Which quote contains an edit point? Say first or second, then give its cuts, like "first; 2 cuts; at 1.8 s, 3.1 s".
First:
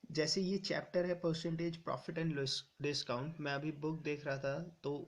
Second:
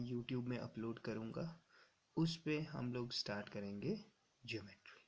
first; 1 cut; at 1.8 s